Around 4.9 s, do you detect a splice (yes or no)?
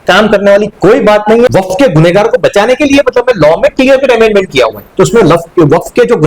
no